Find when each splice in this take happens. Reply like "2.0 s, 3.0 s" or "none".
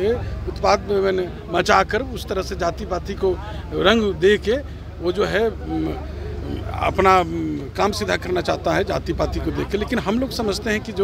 none